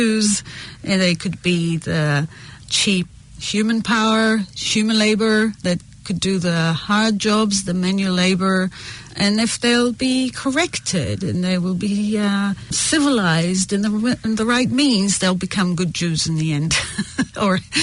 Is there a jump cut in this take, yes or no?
no